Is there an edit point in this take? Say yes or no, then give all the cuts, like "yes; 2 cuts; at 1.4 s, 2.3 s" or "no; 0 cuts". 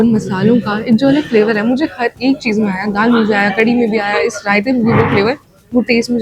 no; 0 cuts